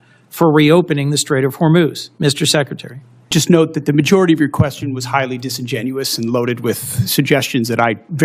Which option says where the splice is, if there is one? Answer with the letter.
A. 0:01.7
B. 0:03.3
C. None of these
B